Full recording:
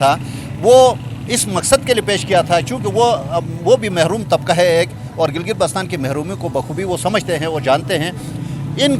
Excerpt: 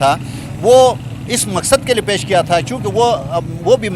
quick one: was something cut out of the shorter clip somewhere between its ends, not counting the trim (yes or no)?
no